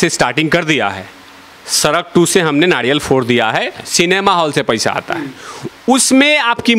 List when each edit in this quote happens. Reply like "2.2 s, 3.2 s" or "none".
3.8 s